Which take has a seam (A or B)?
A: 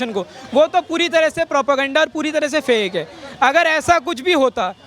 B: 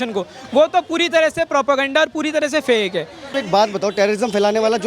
B